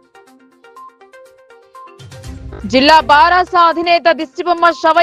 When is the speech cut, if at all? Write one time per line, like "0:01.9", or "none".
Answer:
0:01.0
0:02.4

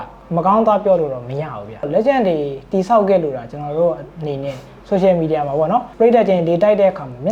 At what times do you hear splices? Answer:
0:01.9
0:04.7
0:05.9

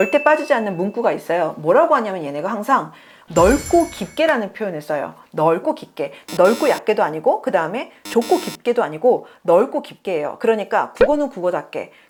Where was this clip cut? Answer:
none

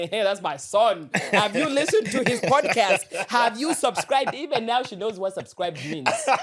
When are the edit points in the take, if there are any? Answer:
none

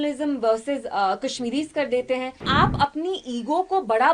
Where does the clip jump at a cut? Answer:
0:02.4

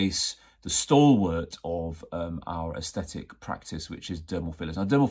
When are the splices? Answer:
none

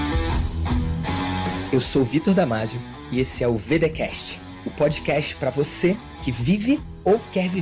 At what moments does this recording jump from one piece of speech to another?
none

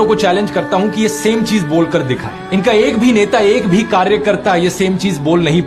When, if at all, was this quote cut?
0:02.4

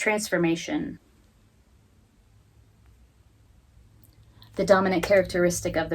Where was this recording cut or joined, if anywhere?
0:01.0

